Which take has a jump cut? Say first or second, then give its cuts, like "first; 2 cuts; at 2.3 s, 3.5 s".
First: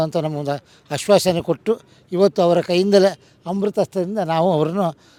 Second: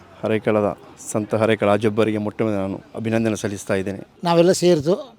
second; 1 cut; at 4.0 s